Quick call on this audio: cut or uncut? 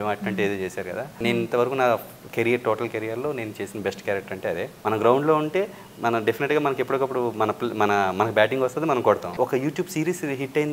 cut